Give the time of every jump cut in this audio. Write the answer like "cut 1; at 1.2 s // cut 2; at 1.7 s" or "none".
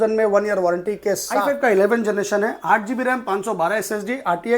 cut 1; at 1.3 s